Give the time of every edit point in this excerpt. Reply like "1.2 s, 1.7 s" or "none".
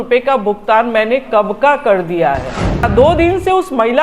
2.9 s